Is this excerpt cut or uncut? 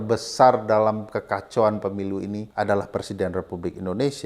cut